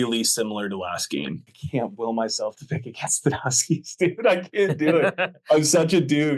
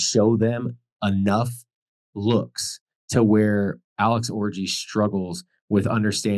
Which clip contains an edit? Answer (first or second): first